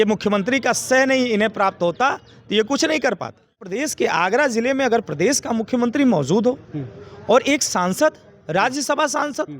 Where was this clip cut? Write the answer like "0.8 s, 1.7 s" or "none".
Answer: 3.7 s